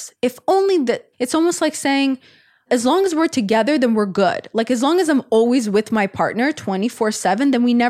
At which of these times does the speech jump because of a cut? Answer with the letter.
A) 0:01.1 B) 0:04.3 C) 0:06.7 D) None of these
A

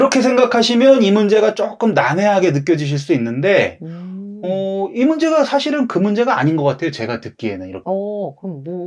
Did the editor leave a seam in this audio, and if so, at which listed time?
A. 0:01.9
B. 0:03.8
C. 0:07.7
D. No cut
C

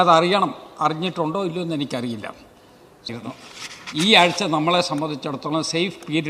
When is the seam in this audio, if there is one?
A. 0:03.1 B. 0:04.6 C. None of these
A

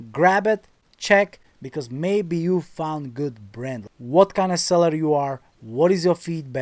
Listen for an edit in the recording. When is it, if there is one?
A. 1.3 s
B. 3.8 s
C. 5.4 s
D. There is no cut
B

